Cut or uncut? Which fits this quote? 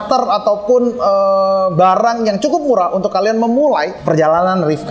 cut